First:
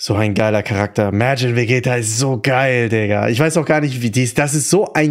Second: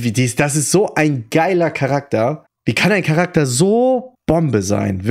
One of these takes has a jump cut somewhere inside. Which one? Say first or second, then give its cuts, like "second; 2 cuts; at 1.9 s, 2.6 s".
second; 2 cuts; at 2.5 s, 4.1 s